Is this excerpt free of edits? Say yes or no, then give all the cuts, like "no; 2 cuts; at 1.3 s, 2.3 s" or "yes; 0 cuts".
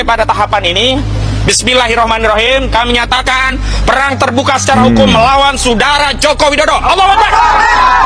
yes; 0 cuts